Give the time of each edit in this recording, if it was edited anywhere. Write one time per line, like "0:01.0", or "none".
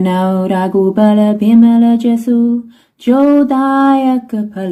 none